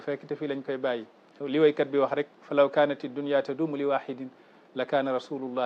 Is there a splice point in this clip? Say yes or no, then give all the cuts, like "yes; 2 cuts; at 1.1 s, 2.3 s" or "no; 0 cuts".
no; 0 cuts